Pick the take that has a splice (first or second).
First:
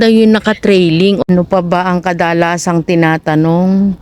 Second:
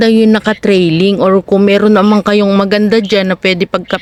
first